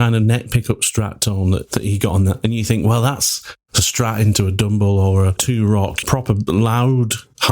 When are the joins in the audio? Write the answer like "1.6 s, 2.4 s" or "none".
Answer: 1.7 s, 5.7 s